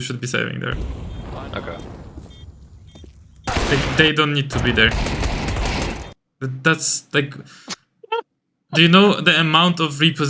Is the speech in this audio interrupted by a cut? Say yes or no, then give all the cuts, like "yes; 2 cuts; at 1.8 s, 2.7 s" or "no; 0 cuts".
no; 0 cuts